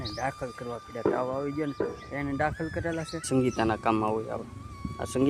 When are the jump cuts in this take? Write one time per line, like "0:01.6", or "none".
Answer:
0:03.2